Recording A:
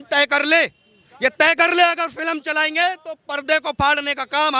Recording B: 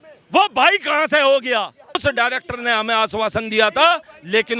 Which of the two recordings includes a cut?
B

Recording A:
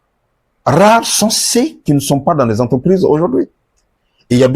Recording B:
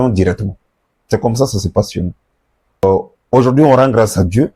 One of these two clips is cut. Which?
B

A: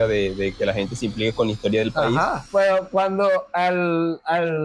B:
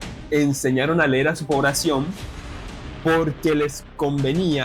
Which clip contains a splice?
A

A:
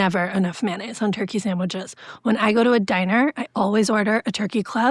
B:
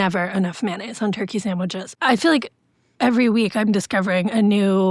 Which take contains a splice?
B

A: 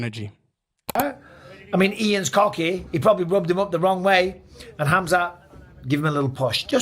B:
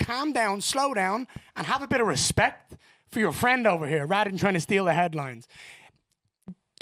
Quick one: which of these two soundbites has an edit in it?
A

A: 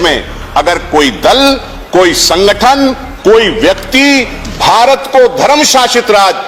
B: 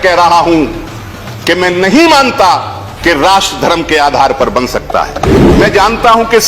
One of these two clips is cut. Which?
B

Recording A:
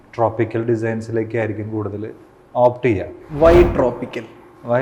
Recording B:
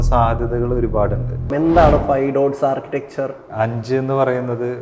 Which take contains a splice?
B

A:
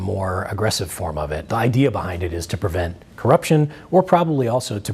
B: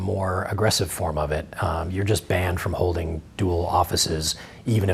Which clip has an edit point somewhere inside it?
A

